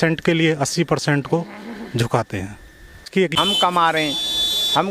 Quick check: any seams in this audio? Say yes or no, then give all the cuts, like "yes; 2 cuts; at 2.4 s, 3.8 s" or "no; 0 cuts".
yes; 1 cut; at 3.0 s